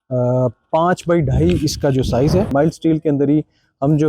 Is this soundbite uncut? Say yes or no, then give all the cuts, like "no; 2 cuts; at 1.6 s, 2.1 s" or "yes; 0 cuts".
no; 1 cut; at 2.5 s